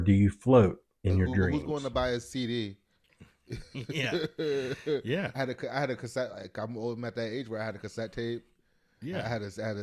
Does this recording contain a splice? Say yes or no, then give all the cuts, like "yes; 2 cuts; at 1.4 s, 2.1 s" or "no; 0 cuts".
yes; 1 cut; at 1.5 s